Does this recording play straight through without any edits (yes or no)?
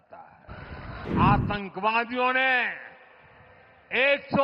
no